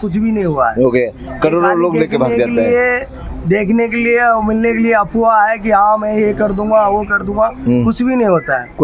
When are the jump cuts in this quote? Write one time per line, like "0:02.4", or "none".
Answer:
none